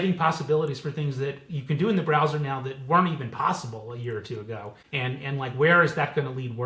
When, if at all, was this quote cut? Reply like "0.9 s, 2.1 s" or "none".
4.7 s